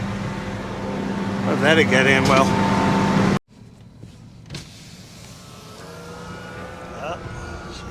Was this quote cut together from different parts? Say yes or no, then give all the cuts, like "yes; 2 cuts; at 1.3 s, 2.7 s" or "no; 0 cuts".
yes; 1 cut; at 3.4 s